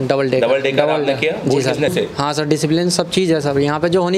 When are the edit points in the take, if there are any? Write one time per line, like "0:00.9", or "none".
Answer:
0:01.9